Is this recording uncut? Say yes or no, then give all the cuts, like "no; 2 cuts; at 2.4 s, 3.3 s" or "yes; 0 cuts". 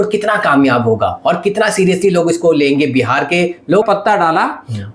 no; 1 cut; at 3.8 s